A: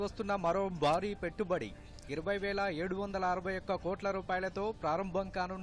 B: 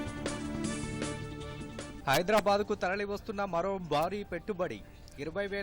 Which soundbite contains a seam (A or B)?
B